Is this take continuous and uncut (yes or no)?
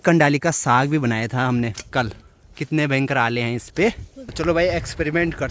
no